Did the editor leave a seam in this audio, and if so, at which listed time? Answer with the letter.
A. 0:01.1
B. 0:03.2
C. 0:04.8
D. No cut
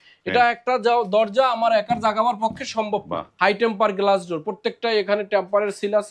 B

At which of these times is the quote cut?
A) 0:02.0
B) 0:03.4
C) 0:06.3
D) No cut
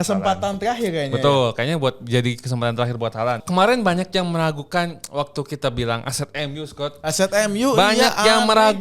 B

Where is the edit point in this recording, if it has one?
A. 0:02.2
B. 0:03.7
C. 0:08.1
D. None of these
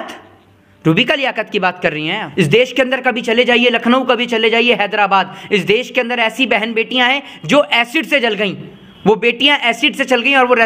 A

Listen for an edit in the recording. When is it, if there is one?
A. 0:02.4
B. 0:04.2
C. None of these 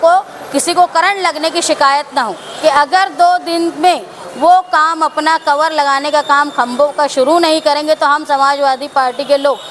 A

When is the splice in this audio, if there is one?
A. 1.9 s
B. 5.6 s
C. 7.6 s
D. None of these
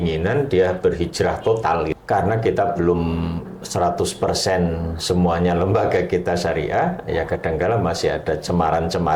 A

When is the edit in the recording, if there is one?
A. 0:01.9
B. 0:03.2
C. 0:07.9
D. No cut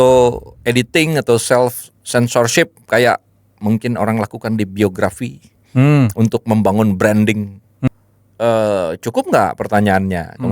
C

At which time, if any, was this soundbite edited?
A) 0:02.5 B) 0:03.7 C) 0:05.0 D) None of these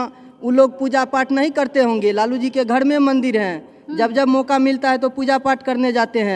D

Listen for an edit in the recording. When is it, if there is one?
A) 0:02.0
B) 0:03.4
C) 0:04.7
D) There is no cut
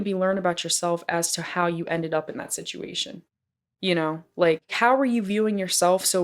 C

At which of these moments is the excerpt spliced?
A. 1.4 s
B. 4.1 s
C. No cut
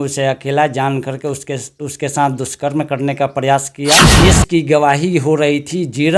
B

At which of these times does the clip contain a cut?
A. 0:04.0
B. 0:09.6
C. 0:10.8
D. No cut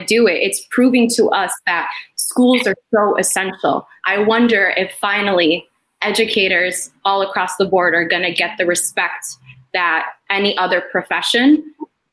A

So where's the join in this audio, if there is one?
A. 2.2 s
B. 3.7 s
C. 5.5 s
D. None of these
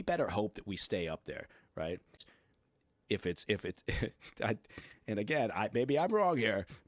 A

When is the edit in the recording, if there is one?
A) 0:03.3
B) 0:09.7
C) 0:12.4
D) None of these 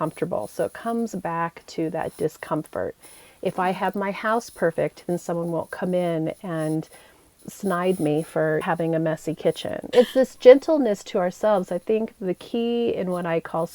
B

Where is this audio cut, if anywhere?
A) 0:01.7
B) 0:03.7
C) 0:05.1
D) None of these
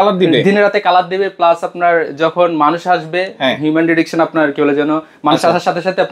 D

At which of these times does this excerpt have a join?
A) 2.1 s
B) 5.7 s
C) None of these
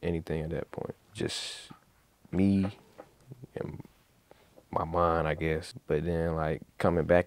B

